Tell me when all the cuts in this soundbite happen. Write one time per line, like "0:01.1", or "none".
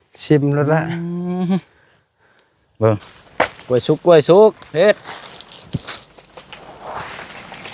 0:03.2

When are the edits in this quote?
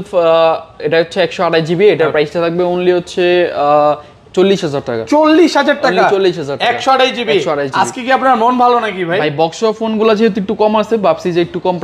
none

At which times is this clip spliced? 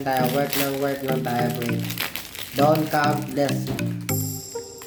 none

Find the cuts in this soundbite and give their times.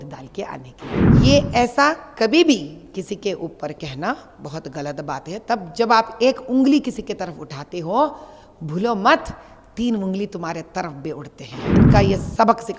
0:01.2
0:11.7

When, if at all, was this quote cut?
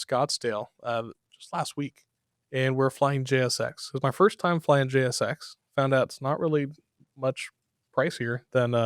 none

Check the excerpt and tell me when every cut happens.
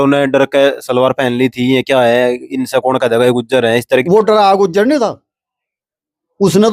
0:04.0

